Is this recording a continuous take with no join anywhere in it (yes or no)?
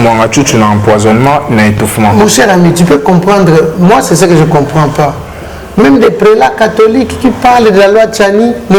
yes